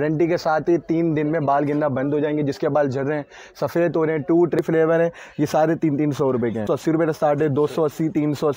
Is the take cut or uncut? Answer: cut